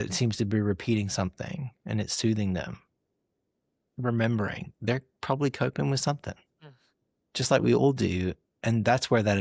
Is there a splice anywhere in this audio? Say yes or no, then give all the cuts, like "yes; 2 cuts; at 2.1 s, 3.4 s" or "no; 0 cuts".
no; 0 cuts